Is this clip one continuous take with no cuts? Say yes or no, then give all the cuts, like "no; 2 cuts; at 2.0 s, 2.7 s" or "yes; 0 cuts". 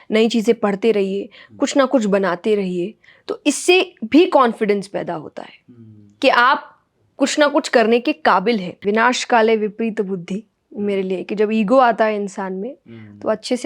no; 1 cut; at 8.8 s